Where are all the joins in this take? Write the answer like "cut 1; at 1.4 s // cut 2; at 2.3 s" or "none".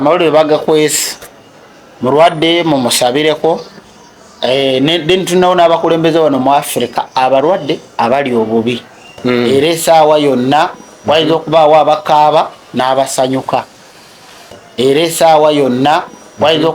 cut 1; at 9.5 s // cut 2; at 14.6 s